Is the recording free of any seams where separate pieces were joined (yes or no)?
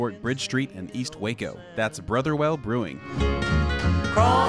no